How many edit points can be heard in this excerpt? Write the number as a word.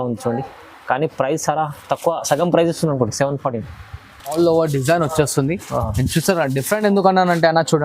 one